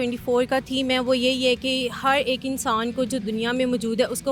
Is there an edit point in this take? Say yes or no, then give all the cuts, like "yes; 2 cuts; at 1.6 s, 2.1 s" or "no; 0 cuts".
no; 0 cuts